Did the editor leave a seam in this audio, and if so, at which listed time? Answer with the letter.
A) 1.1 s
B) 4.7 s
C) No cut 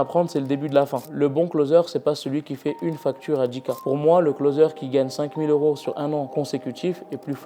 A